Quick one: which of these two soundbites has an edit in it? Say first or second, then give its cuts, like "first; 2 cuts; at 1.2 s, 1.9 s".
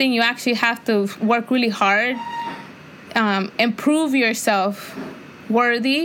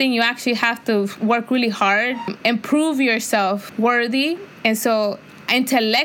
second; 3 cuts; at 2.3 s, 3.7 s, 4.5 s